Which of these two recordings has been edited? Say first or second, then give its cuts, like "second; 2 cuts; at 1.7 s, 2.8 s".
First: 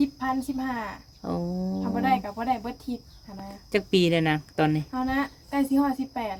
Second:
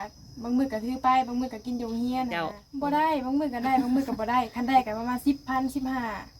second; 1 cut; at 2.6 s